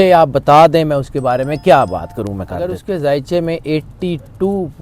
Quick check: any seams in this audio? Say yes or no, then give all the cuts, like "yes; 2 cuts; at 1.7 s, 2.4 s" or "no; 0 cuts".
yes; 1 cut; at 2.7 s